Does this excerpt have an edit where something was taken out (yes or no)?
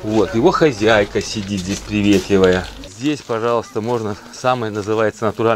yes